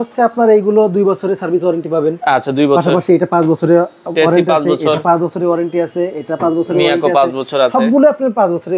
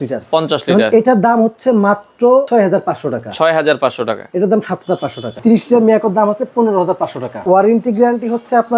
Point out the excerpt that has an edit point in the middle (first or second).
second